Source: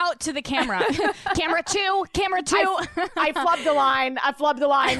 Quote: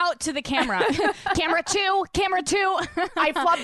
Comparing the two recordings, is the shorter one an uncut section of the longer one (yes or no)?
yes